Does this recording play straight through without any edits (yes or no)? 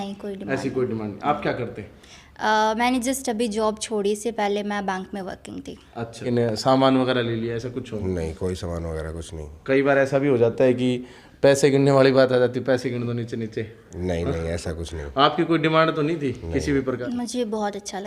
no